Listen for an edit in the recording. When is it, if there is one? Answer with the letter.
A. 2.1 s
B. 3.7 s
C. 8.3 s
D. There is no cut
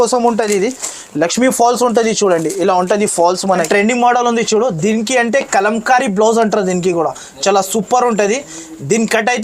B